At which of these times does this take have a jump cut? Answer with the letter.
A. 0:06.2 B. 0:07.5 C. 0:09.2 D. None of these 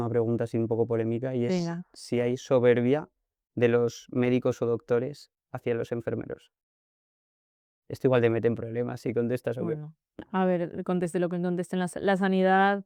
D